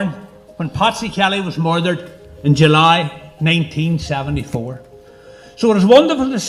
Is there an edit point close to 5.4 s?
no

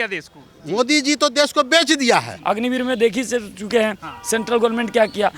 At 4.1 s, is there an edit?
no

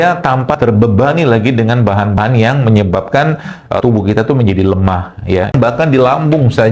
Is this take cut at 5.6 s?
yes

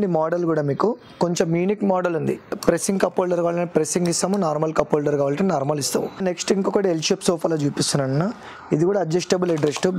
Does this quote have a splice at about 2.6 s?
yes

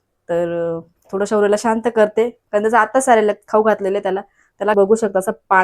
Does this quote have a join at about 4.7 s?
yes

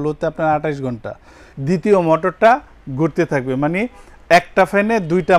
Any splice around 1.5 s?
yes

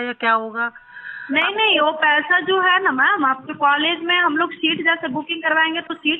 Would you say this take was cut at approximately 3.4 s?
no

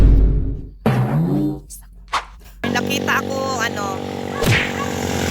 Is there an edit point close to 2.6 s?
yes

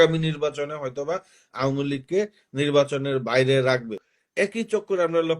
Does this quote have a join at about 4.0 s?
yes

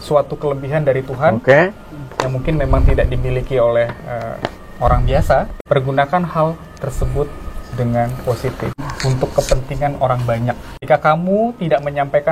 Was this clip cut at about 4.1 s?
no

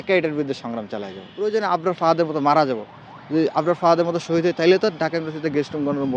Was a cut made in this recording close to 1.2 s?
yes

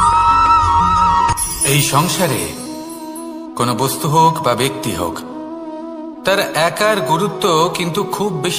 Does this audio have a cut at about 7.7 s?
no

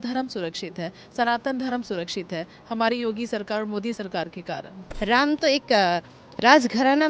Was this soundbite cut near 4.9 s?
yes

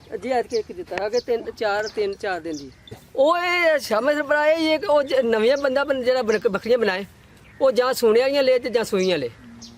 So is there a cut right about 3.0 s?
yes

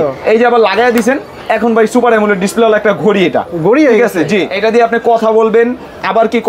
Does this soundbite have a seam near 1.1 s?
no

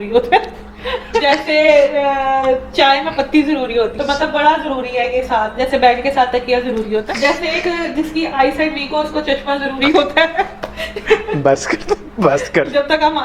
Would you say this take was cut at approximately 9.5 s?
no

